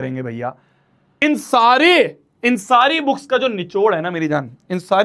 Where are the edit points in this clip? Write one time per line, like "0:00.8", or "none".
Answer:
0:01.1